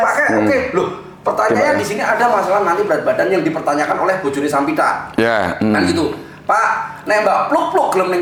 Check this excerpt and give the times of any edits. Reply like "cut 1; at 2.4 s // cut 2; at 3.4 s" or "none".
none